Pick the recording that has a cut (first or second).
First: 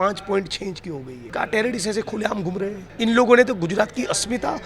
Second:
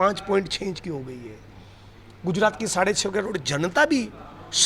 first